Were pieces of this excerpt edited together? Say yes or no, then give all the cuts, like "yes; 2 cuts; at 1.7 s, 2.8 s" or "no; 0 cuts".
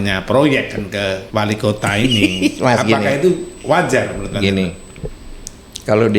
yes; 1 cut; at 1.2 s